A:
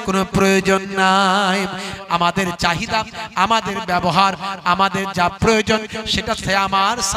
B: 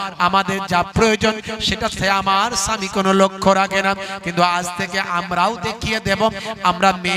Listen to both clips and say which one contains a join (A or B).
A